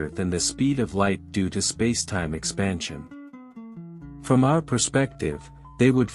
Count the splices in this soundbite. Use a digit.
2